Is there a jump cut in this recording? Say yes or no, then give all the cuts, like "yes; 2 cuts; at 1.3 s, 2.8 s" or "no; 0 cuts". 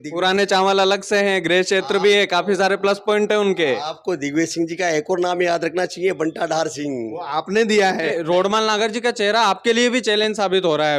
yes; 1 cut; at 8.1 s